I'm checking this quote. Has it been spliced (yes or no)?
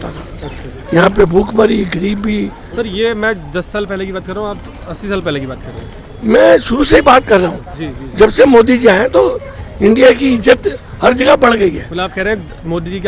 no